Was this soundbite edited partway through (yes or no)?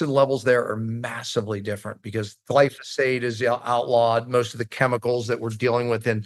no